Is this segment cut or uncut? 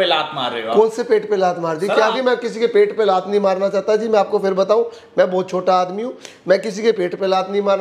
cut